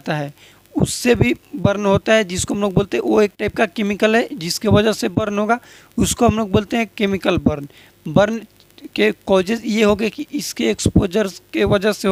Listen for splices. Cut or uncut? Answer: uncut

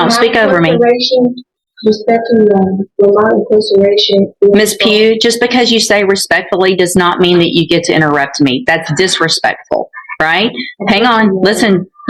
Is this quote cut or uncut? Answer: uncut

